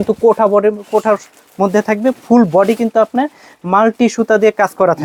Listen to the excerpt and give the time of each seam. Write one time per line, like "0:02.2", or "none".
none